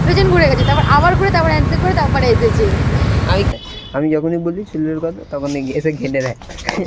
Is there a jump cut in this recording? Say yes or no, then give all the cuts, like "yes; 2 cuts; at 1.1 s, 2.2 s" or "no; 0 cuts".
yes; 1 cut; at 3.5 s